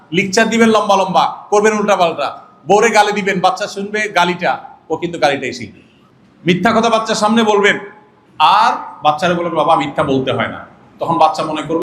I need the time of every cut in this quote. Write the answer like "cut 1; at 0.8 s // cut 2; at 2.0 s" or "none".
none